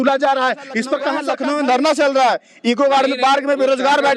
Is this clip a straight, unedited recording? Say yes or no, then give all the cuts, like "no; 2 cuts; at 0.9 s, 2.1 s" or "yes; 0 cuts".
no; 1 cut; at 1.2 s